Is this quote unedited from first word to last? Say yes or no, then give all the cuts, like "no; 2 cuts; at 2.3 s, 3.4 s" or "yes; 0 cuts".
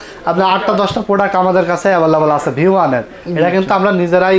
yes; 0 cuts